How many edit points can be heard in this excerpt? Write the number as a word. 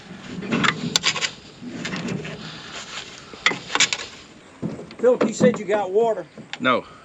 one